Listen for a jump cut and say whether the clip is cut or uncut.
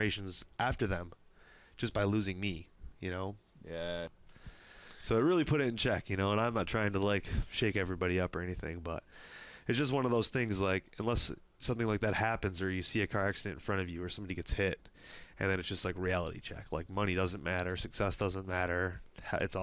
cut